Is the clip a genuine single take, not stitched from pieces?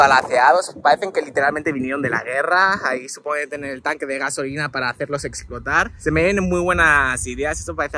yes; 0 cuts

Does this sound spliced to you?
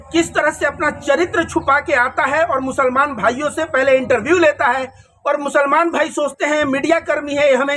no; 0 cuts

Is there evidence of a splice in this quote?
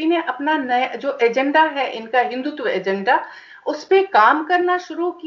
no; 0 cuts

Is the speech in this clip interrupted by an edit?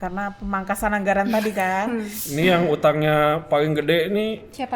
yes; 1 cut; at 2.2 s

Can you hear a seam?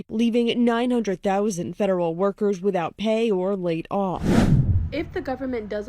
yes; 1 cut; at 4.2 s

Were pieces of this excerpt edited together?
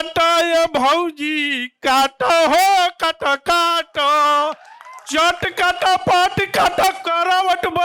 no; 0 cuts

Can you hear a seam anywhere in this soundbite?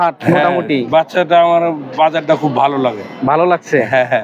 no; 0 cuts

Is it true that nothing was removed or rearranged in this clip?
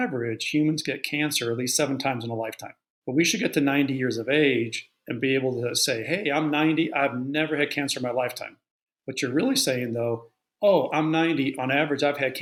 yes; 0 cuts

